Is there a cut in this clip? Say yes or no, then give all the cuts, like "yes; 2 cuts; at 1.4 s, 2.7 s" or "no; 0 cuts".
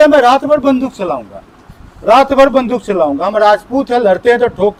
no; 0 cuts